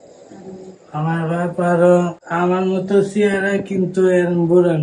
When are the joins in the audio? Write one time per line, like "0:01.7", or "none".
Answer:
0:02.2